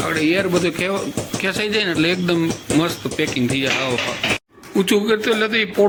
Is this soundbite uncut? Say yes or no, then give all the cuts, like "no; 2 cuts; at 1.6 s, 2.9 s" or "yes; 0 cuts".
yes; 0 cuts